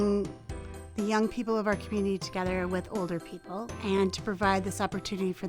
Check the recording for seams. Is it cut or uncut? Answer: cut